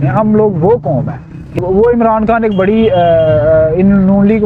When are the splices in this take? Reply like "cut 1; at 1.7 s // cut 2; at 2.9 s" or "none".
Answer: cut 1; at 1.6 s